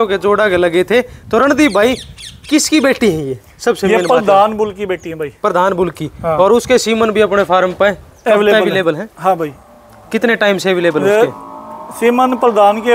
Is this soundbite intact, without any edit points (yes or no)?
yes